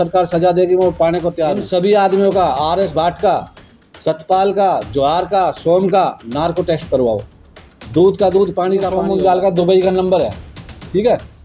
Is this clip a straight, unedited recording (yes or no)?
no